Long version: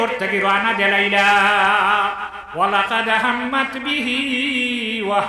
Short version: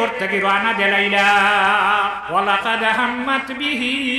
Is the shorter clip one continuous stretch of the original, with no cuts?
no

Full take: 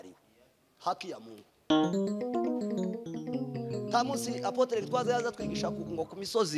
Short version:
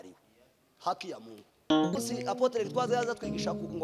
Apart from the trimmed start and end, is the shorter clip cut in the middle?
yes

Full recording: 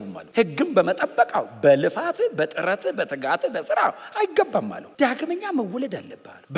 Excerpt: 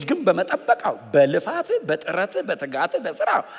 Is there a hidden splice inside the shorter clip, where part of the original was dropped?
no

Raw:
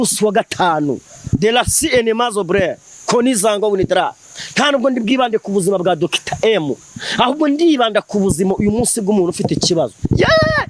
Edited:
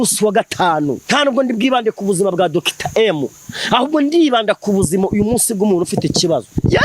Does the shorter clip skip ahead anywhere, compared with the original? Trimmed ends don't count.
yes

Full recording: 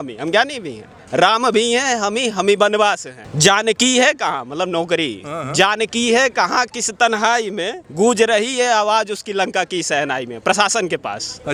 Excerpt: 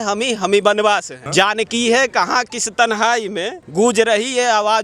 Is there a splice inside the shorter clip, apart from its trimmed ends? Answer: yes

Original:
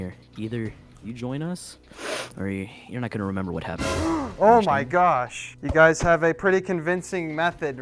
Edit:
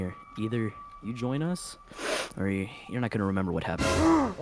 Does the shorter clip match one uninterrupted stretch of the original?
yes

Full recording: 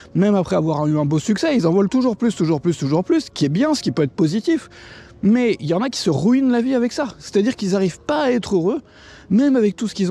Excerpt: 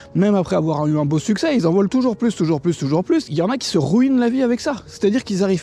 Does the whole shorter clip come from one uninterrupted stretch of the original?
no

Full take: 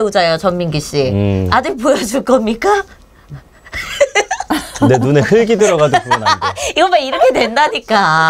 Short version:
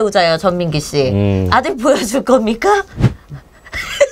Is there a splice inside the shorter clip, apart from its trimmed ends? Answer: no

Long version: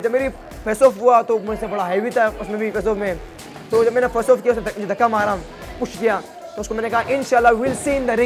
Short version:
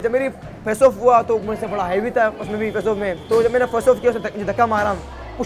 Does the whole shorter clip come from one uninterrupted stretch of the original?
no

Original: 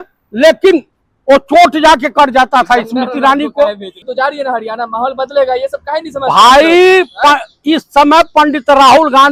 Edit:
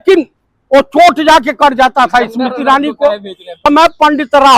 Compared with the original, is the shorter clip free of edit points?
no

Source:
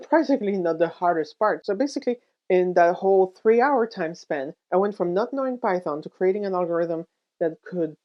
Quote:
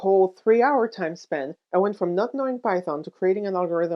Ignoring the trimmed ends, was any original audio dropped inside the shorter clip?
no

